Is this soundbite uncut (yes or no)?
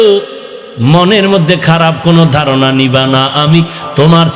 yes